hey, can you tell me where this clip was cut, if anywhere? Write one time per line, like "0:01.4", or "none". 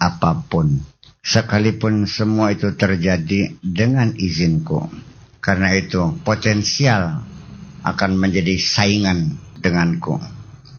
0:09.5

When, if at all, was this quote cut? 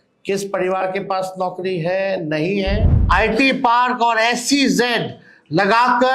0:03.0

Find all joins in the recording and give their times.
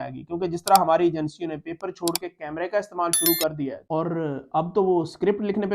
0:03.8

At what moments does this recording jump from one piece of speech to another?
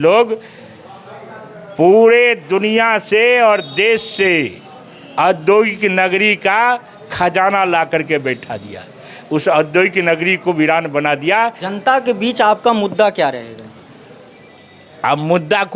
0:11.7

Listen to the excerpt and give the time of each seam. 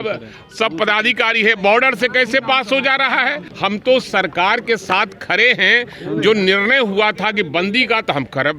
0:03.4

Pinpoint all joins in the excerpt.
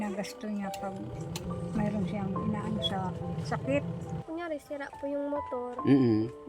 0:04.2

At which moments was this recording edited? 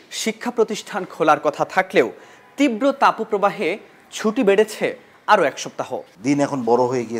0:06.1

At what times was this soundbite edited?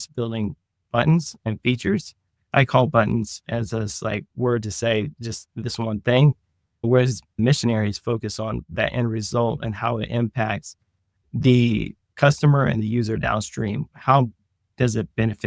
0:02.5

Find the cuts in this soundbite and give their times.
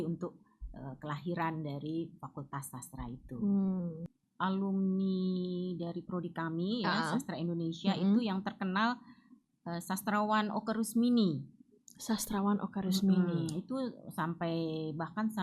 0:04.1

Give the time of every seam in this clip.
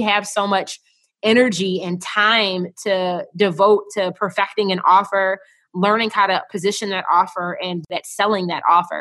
0:07.9

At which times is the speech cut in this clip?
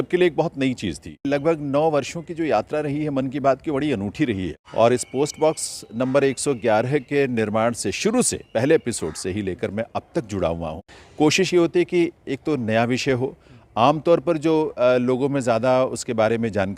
0:01.2
0:04.5
0:10.8

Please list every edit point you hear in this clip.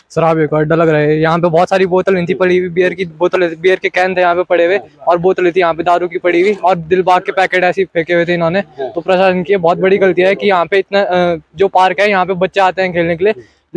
none

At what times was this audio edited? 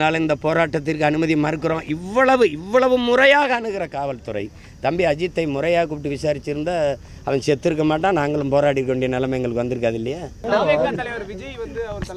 0:10.3

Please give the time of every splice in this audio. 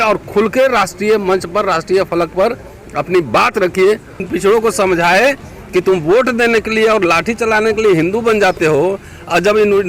0:04.2

